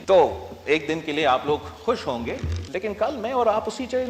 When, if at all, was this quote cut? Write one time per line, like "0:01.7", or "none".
0:02.5